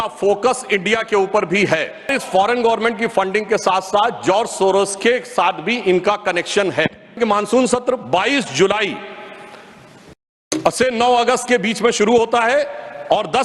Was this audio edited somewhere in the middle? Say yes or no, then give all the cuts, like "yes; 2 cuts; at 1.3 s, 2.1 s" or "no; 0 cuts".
yes; 2 cuts; at 2.1 s, 7.2 s